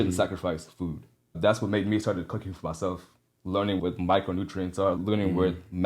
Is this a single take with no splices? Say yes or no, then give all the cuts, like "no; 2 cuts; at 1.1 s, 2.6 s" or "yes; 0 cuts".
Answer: no; 3 cuts; at 1.3 s, 3.8 s, 5.0 s